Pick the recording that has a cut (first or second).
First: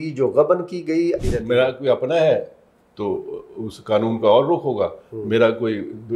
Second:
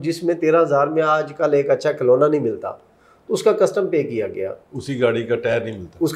first